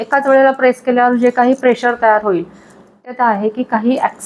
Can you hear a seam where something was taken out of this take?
yes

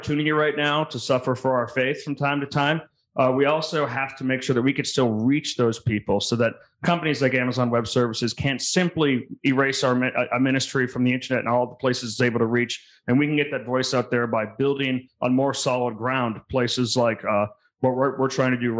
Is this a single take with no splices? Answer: yes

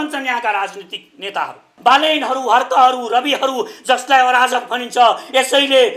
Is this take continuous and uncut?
no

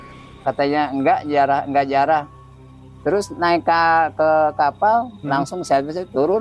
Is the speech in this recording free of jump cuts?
yes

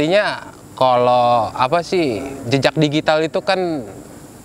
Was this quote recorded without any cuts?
yes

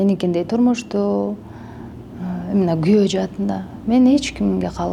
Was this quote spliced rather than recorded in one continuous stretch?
no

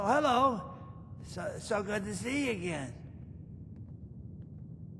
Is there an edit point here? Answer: yes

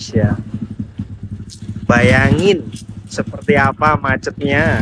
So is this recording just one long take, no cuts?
yes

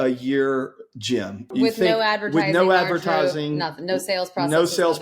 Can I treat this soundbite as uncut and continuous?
no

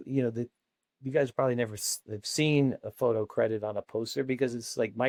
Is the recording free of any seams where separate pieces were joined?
yes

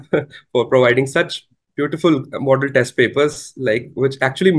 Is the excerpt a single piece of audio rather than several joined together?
yes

